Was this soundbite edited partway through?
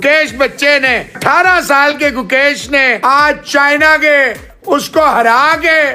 yes; 2 cuts; at 1.2 s, 3.0 s

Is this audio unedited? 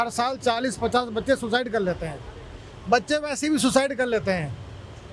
yes; 0 cuts

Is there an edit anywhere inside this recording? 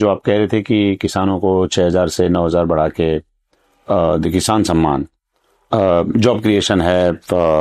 no; 0 cuts

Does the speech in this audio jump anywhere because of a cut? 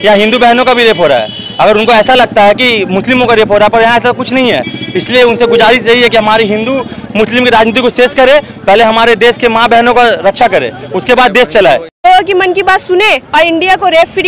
yes; 1 cut; at 12.0 s

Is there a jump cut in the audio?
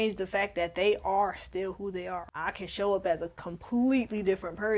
yes; 1 cut; at 2.3 s

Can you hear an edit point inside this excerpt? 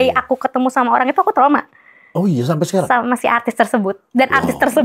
no; 0 cuts

